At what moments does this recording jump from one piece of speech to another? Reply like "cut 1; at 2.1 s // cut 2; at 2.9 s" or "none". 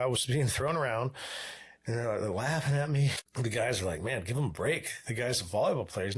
cut 1; at 3.2 s